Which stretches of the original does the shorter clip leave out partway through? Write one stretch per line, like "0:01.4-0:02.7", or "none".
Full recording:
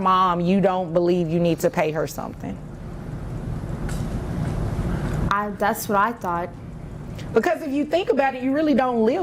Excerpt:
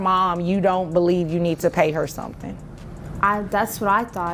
0:03.1-0:05.2